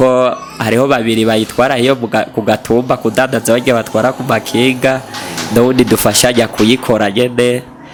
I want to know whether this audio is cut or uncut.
uncut